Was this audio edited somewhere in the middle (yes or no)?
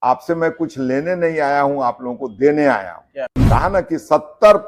yes